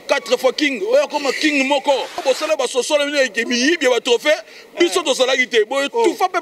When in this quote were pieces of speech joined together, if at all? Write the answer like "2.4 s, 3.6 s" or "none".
2.2 s